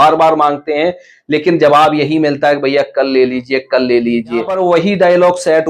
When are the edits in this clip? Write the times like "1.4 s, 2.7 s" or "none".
4.5 s